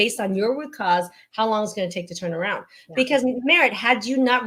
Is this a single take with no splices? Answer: yes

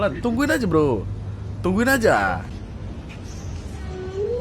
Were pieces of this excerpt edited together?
yes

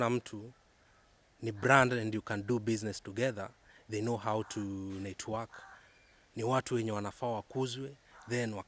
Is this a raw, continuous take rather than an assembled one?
yes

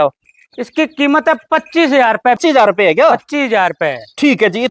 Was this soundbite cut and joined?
yes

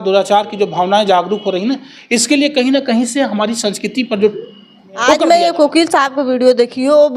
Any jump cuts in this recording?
yes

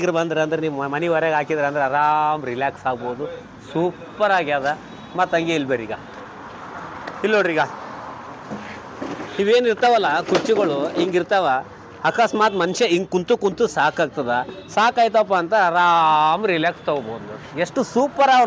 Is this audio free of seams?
yes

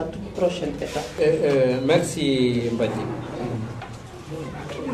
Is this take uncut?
no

